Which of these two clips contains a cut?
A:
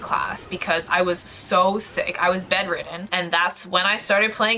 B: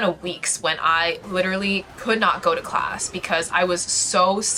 A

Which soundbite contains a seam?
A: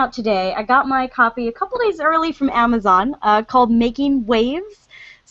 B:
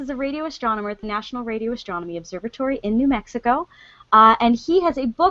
B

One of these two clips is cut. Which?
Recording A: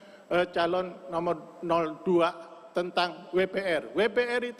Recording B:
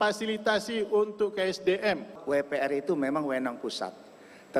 B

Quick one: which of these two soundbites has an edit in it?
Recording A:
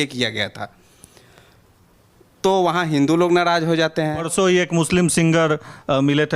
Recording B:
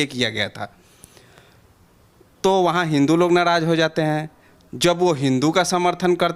A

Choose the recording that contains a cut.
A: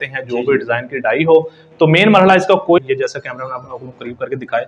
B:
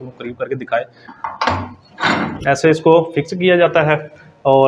A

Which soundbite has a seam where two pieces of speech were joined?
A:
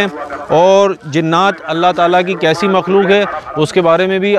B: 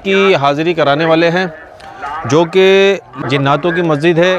B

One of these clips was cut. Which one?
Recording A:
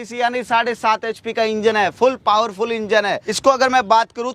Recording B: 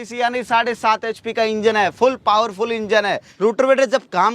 B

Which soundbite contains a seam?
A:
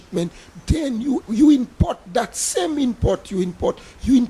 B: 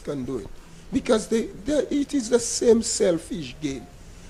A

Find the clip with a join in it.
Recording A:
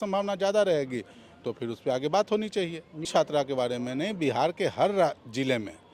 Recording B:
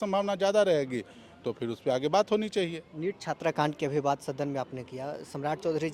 A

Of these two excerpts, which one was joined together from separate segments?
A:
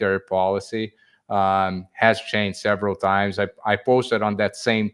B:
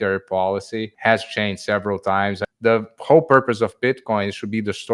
B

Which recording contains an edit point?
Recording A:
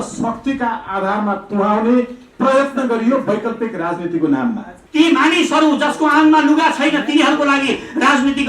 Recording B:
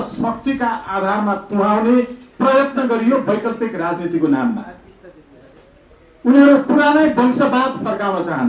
A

